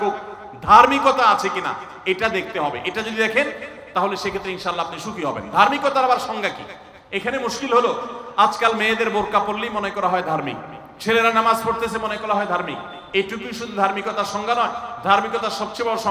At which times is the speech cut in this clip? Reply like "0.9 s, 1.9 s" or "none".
none